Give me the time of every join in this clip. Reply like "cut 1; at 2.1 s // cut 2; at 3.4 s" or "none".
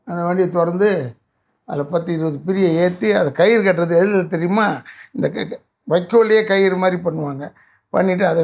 none